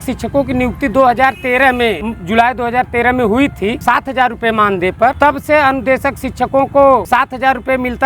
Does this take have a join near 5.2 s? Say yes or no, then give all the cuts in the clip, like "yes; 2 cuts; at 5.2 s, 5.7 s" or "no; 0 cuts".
yes; 4 cuts; at 2.1 s, 3.8 s, 5.2 s, 7.0 s